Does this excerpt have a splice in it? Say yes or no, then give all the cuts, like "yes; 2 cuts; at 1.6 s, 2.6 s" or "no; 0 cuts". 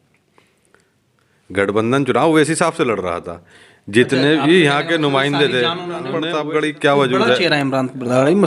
yes; 1 cut; at 6.2 s